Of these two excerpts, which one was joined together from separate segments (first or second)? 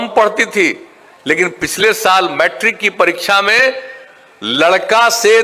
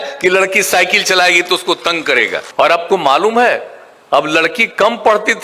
second